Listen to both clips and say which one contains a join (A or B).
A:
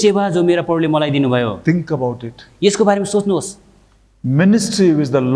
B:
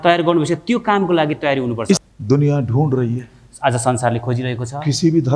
B